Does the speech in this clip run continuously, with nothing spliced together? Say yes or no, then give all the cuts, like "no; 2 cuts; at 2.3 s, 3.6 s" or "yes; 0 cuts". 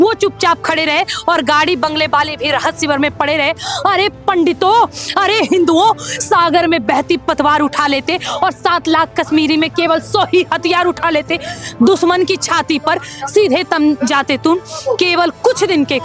yes; 0 cuts